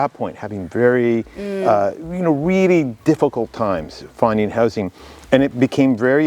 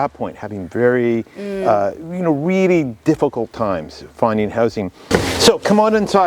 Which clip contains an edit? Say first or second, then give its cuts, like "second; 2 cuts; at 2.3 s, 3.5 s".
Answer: second; 1 cut; at 5.0 s